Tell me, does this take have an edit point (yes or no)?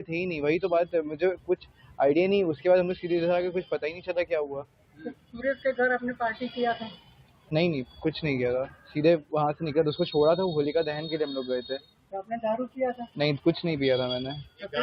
no